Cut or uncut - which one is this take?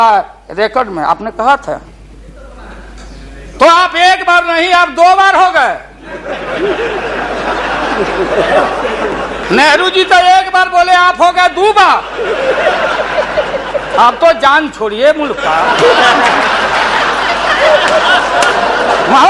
uncut